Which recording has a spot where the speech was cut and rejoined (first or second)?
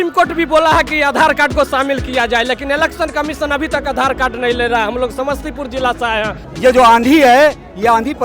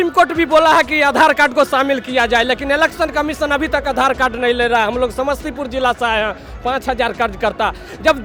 first